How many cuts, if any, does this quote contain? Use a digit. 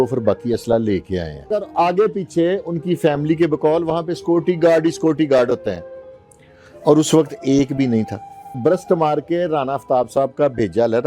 2